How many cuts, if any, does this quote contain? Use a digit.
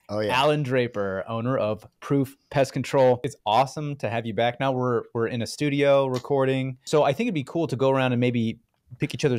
2